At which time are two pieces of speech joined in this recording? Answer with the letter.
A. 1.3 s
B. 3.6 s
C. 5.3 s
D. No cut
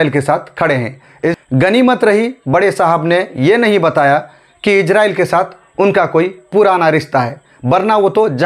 A